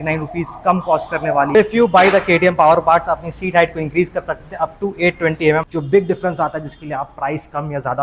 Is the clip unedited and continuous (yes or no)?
no